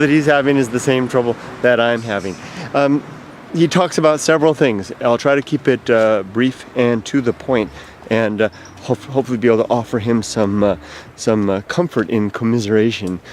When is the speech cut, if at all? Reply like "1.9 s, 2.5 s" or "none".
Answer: 5.6 s